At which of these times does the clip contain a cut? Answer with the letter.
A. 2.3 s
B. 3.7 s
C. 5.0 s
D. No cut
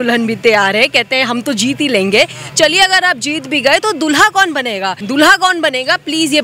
C